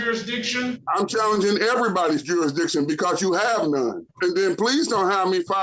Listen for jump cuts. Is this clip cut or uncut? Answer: cut